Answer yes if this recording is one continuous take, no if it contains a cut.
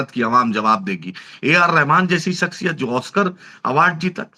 yes